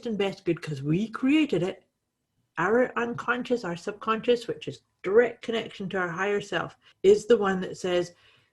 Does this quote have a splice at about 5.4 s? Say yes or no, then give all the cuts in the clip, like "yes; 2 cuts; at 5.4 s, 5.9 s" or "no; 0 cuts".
no; 1 cut; at 6.8 s